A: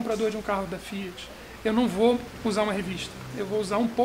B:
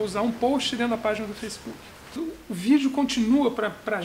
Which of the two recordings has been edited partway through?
B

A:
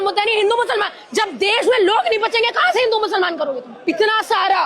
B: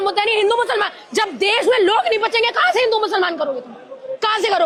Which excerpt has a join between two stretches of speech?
A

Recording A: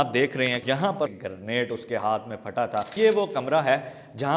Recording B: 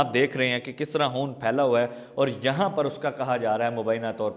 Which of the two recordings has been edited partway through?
A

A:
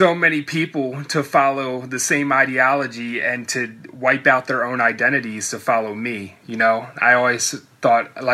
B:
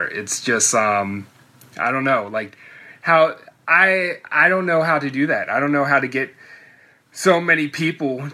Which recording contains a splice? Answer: A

